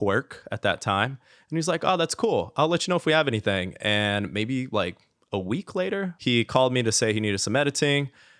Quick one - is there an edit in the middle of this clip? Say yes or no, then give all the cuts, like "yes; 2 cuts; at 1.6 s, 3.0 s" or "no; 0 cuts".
yes; 1 cut; at 6.1 s